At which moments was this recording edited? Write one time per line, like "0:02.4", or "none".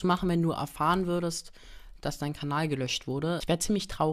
none

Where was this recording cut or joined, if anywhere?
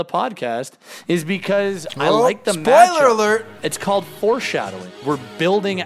0:04.9

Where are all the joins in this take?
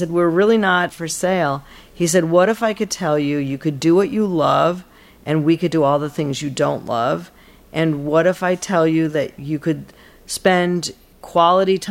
0:00.9

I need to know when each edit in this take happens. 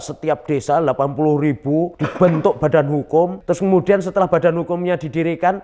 0:02.0
0:03.4

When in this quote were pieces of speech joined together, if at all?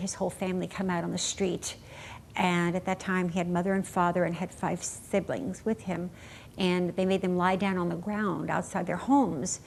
none

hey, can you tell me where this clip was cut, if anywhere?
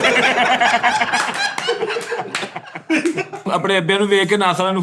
0:03.4

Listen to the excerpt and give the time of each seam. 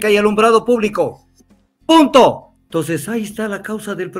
0:02.5

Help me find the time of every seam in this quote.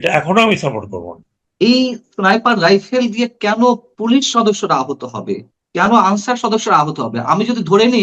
0:01.4

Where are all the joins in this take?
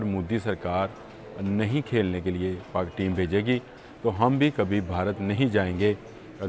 none

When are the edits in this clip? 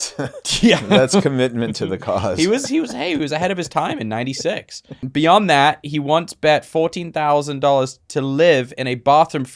0:05.1

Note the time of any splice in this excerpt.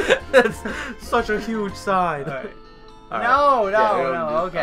none

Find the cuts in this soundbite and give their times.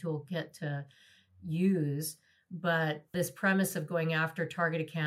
none

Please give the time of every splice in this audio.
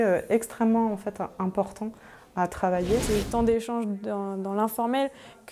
0:03.0

